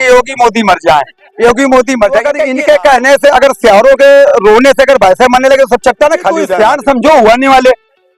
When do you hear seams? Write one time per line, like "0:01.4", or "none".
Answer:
0:02.4
0:06.5